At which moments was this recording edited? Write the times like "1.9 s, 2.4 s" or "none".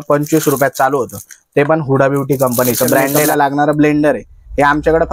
3.2 s